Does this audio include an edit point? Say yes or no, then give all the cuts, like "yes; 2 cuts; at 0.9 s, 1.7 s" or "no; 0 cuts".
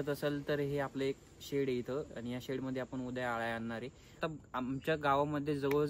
yes; 1 cut; at 4.2 s